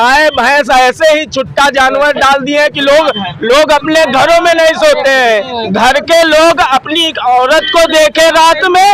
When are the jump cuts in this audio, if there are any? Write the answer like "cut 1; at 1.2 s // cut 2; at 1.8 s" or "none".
cut 1; at 5.6 s